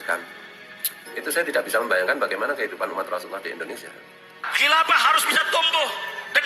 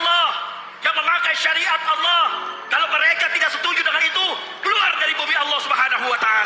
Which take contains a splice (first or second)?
first